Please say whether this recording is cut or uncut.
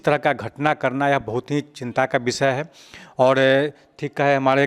uncut